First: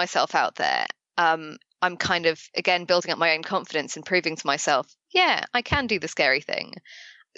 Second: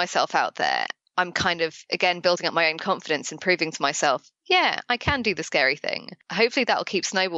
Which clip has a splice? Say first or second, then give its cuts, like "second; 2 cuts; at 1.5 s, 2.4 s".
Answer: second; 2 cuts; at 1.0 s, 6.2 s